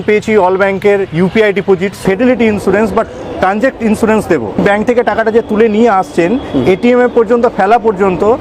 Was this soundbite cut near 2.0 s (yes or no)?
yes